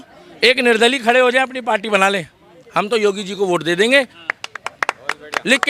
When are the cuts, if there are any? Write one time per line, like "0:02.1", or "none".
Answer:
0:04.2